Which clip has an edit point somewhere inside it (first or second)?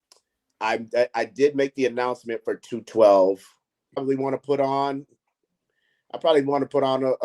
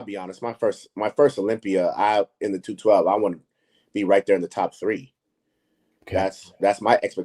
first